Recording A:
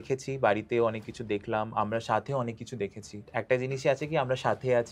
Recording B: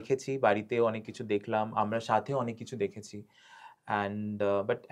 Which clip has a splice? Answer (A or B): A